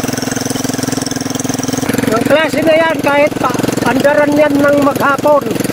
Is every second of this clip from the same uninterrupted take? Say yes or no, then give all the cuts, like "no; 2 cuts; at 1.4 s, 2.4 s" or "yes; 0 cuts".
no; 1 cut; at 1.9 s